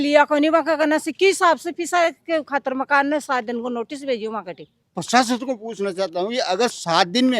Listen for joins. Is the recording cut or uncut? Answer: cut